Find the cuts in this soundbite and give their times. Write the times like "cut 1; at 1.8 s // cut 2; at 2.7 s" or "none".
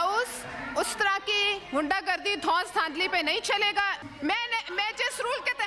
cut 1; at 4.0 s